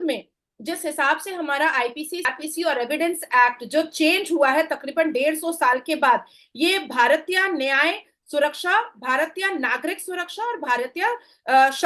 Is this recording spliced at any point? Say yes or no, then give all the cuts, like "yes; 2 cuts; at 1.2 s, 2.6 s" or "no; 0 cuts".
yes; 1 cut; at 2.3 s